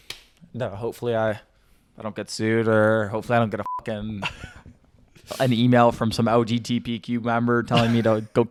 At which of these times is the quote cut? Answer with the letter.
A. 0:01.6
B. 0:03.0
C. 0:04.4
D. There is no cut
D